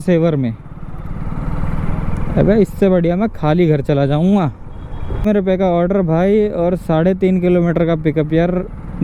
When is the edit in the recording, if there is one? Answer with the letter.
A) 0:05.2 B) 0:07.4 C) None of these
A